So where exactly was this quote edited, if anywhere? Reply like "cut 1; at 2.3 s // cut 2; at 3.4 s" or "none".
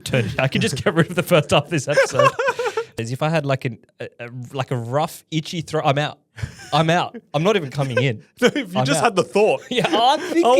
cut 1; at 2.9 s